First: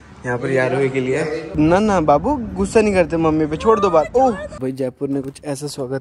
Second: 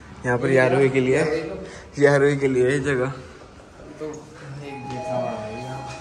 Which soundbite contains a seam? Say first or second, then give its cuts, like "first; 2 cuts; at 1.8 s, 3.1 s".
first; 2 cuts; at 1.5 s, 4.5 s